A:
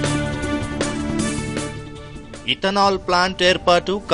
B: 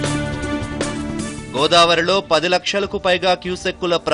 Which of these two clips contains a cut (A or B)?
A